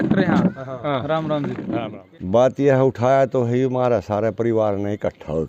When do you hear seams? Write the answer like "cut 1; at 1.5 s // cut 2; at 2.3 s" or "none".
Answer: cut 1; at 1.9 s